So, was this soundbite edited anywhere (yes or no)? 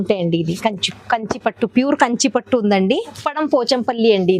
yes